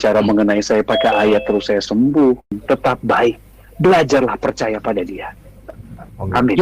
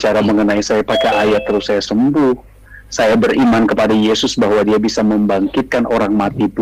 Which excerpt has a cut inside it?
first; 1 cut; at 2.6 s

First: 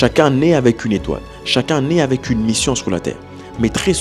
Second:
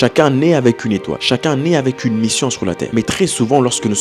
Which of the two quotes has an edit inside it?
second; 2 cuts; at 1.1 s, 2.8 s

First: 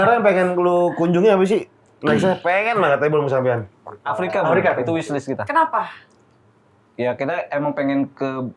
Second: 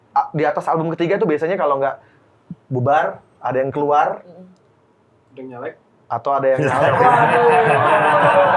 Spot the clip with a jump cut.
first; 1 cut; at 4.0 s

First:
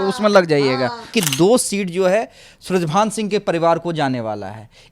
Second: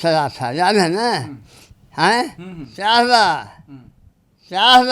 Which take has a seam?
first; 1 cut; at 1.1 s

